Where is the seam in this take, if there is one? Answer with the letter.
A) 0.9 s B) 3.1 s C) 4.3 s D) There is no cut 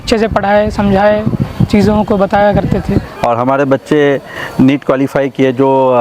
B